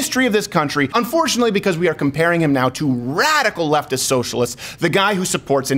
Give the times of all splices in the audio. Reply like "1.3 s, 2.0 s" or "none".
0.9 s